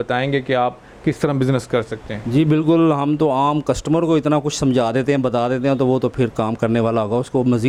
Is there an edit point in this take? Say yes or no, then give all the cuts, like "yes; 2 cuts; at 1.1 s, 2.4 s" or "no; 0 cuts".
no; 0 cuts